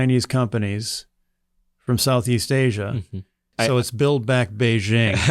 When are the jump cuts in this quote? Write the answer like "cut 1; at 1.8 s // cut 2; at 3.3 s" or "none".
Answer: cut 1; at 3.5 s